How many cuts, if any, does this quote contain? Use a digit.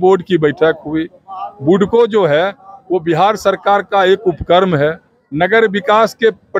0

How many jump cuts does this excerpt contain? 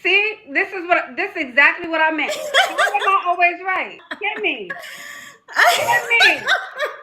1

